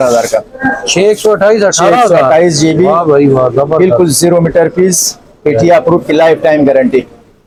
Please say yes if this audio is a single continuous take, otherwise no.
yes